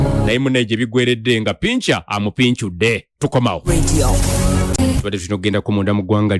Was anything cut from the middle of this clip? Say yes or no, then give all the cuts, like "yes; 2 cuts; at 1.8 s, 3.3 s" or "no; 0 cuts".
no; 0 cuts